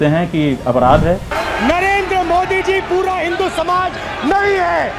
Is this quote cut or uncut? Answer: cut